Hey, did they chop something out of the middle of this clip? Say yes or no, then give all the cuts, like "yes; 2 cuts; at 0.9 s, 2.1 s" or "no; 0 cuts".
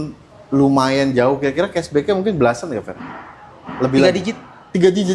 no; 0 cuts